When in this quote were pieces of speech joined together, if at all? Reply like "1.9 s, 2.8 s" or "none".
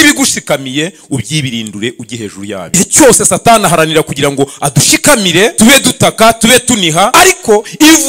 2.7 s, 5.5 s, 7.1 s